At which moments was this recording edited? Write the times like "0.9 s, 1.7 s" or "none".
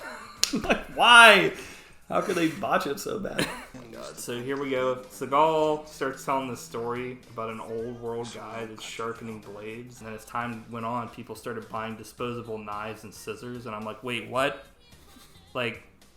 3.5 s, 10.0 s